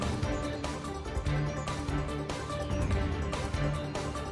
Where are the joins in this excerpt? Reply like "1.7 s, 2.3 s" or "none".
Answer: none